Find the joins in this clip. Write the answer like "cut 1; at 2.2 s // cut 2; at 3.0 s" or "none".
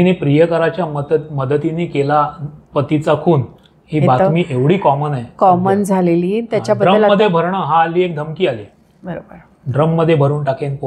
none